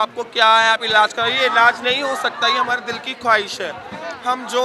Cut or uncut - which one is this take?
uncut